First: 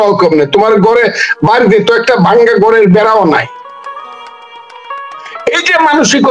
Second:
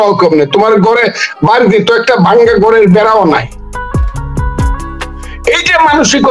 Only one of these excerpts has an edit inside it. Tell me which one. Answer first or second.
second